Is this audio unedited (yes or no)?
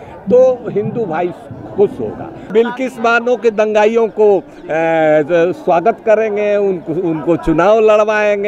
no